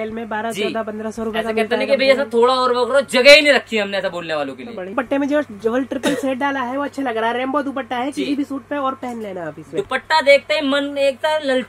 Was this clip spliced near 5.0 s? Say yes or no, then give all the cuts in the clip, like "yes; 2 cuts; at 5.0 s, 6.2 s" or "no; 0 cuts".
yes; 1 cut; at 5.0 s